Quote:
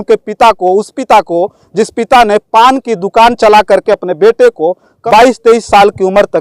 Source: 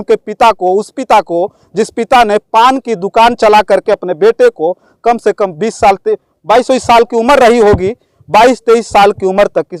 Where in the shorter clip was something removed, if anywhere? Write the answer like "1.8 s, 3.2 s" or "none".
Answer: 4.9 s